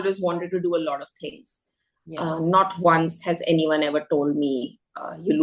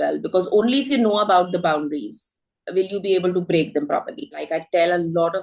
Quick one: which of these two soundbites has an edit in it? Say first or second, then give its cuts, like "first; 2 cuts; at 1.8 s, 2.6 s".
second; 1 cut; at 4.5 s